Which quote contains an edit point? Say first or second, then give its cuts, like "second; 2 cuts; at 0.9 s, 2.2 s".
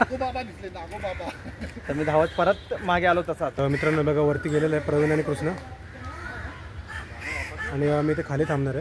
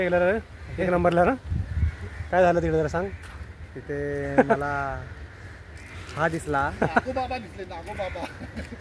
first; 1 cut; at 3.6 s